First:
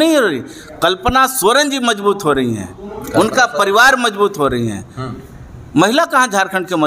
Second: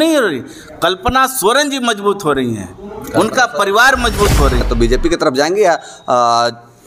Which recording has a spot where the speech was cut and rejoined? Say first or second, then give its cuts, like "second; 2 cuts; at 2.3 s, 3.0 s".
second; 1 cut; at 4.6 s